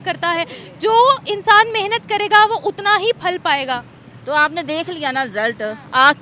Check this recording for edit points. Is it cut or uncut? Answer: uncut